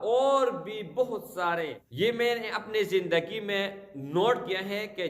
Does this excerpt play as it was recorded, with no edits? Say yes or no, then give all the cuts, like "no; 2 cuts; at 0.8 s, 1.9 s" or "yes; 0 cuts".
no; 1 cut; at 1.8 s